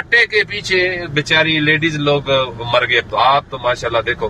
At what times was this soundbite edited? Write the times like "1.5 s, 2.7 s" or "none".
3.0 s